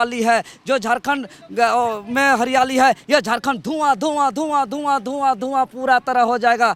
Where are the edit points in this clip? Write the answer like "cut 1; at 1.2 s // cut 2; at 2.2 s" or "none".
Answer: none